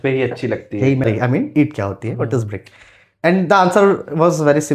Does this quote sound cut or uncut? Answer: cut